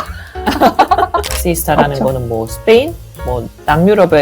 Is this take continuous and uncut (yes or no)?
no